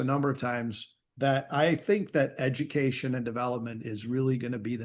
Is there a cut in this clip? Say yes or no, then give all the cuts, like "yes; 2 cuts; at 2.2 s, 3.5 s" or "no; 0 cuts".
no; 0 cuts